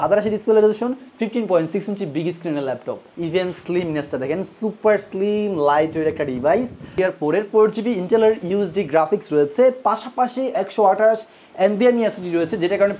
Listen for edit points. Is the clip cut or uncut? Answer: cut